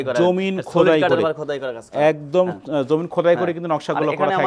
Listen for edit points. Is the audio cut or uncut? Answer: uncut